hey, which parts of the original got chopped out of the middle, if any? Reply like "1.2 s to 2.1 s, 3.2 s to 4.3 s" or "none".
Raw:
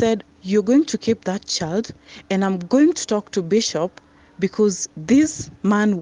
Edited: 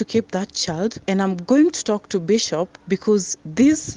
1.9 s to 2.2 s, 4.0 s to 4.3 s